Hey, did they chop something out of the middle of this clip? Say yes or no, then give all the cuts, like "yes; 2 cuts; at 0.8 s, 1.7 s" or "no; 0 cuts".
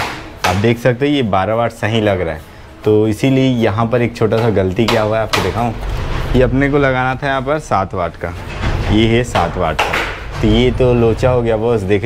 no; 0 cuts